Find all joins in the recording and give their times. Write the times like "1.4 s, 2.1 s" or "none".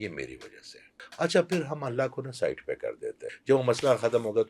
1.0 s, 3.3 s

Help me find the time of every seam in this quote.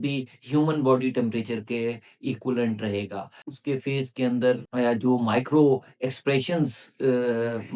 3.5 s

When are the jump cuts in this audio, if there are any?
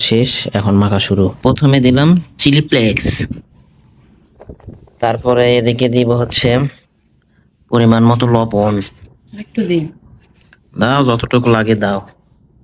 1.7 s

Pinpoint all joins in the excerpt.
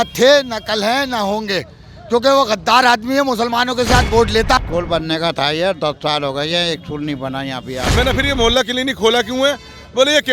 4.6 s, 7.8 s

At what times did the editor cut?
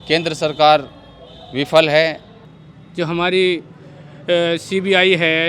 2.3 s

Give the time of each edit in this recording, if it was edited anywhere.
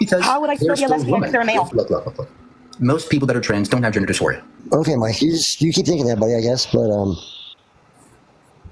1.7 s, 4.5 s

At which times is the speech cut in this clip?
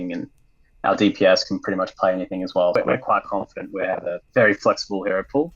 2.8 s

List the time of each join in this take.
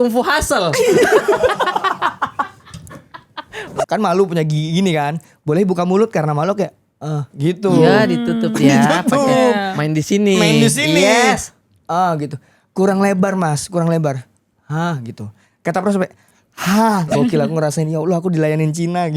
3.7 s, 17.1 s

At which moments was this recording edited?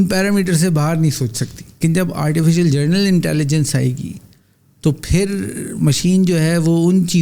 1.8 s

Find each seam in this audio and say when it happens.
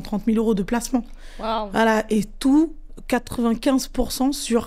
none

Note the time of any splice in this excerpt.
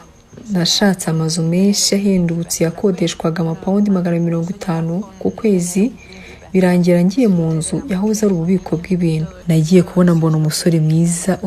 9.3 s

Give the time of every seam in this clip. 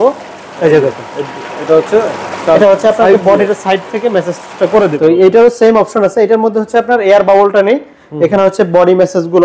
4.9 s

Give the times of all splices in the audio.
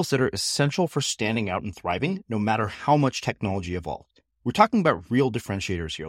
none

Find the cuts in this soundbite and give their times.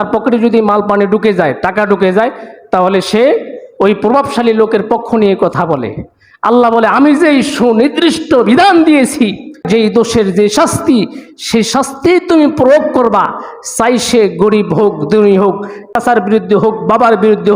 9.6 s, 15.9 s

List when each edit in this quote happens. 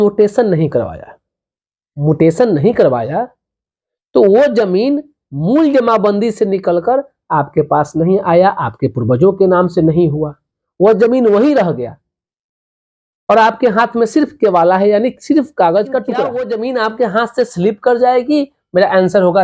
16.4 s

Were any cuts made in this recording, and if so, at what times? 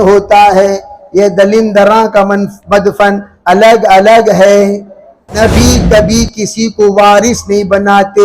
5.4 s

